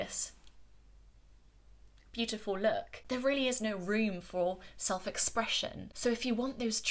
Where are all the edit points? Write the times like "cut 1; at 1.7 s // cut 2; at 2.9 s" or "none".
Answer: cut 1; at 2.9 s // cut 2; at 5.9 s